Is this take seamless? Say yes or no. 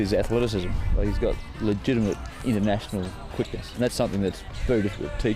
no